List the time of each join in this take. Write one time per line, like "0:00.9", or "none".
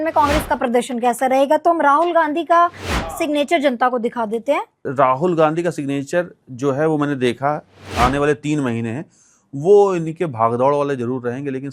0:04.9
0:07.8